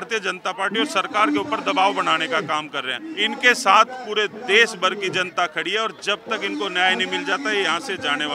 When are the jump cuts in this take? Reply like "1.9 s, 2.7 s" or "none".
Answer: 3.2 s